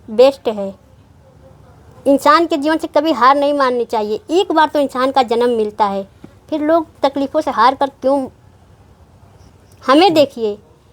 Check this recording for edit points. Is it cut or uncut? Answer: cut